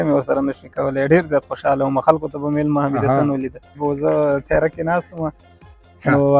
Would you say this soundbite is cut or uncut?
cut